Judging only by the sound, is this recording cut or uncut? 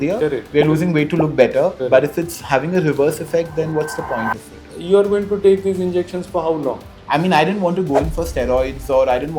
cut